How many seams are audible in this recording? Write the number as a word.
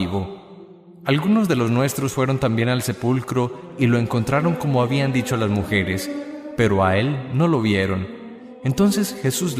one